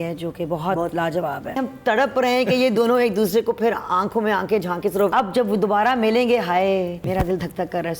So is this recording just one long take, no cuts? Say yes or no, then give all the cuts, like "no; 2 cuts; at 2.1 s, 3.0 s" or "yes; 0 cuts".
no; 3 cuts; at 1.6 s, 5.1 s, 7.0 s